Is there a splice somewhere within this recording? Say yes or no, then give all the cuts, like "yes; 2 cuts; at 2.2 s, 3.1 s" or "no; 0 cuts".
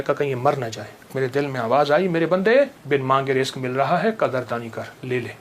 yes; 2 cuts; at 1.1 s, 2.8 s